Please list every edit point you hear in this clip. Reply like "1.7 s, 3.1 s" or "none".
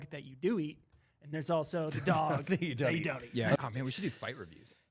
3.6 s